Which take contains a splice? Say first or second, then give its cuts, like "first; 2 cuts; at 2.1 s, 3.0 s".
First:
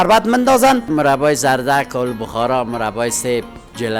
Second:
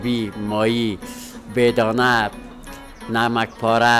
first; 1 cut; at 0.9 s